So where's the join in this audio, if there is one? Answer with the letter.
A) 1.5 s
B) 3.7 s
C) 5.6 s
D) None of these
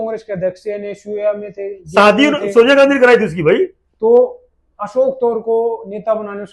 D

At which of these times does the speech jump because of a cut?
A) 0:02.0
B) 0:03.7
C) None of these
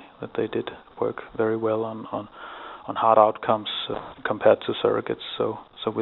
B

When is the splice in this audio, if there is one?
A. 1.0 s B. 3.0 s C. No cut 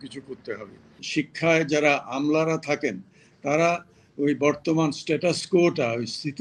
A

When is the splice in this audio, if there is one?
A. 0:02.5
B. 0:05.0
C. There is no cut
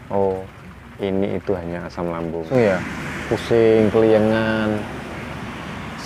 A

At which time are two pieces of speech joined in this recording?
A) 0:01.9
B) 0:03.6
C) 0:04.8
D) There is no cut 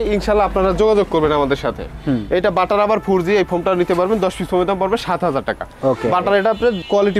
D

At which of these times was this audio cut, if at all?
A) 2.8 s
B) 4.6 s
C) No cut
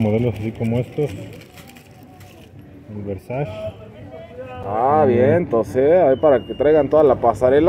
C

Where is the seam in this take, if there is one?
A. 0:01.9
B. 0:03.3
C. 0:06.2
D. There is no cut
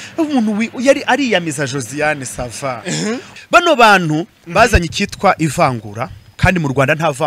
B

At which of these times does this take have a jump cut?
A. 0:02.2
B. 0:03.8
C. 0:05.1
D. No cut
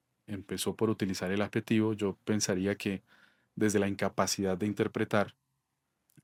D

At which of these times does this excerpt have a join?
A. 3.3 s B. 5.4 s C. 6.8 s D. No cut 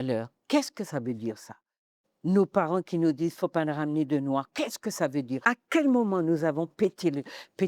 B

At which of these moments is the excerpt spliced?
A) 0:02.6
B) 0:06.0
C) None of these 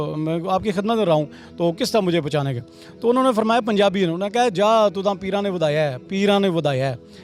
C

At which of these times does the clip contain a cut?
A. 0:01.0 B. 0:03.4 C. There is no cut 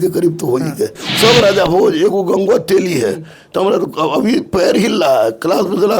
A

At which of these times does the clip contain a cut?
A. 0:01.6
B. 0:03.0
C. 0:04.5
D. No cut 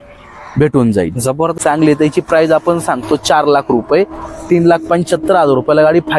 A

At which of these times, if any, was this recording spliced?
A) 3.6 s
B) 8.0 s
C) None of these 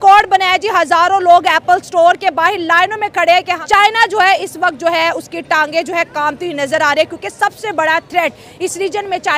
A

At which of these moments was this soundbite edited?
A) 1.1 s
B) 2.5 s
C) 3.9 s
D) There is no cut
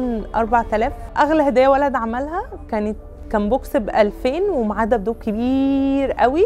A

